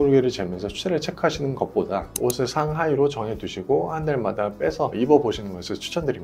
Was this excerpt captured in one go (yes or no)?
yes